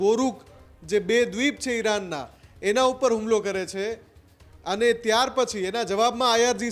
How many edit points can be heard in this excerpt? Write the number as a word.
zero